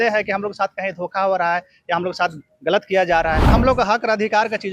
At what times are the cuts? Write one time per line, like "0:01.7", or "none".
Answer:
0:03.5